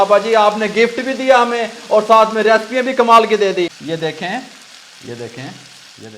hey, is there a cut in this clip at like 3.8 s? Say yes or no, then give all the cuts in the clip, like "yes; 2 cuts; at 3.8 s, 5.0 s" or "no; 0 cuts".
yes; 1 cut; at 3.8 s